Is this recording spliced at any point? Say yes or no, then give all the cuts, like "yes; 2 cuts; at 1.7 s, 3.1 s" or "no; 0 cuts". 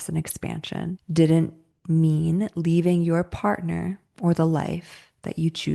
yes; 1 cut; at 1.0 s